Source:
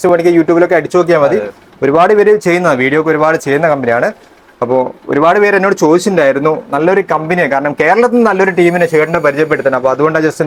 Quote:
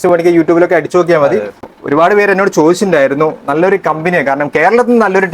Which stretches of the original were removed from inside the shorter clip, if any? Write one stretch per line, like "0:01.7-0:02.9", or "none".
0:01.7-0:04.9